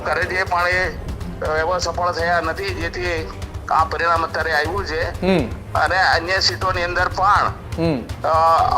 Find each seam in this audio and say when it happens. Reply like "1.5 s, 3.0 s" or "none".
none